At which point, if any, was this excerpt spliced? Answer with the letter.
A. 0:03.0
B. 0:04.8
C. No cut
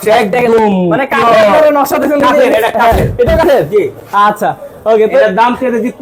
C